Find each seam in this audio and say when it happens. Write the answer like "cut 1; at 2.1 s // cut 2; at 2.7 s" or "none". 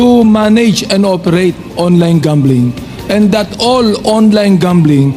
none